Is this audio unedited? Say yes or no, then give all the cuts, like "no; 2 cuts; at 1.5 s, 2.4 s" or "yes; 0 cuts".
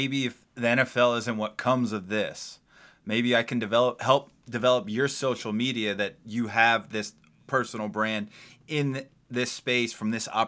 yes; 0 cuts